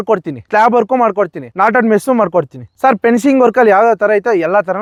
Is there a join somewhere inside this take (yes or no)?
no